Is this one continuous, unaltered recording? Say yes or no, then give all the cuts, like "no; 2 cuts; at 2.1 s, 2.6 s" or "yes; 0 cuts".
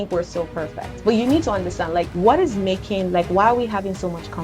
no; 1 cut; at 2.1 s